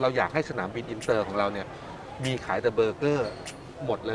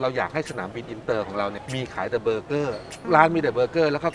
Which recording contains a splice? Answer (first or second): second